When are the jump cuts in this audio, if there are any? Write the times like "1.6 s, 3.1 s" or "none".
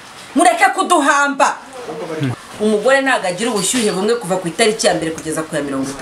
2.4 s